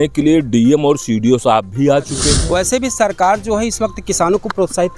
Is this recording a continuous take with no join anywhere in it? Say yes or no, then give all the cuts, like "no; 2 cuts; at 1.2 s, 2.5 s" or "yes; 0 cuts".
no; 1 cut; at 2.4 s